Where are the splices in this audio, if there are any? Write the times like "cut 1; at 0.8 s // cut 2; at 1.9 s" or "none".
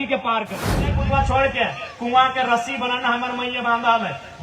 cut 1; at 1.0 s